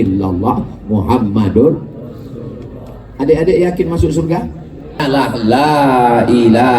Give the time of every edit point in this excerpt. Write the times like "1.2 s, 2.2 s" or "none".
5.0 s